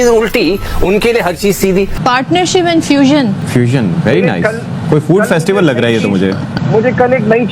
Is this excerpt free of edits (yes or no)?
no